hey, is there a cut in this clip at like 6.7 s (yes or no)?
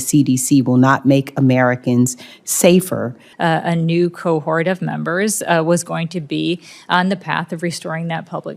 no